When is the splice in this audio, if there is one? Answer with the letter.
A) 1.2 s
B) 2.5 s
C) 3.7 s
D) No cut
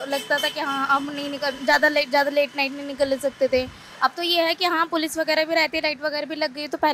D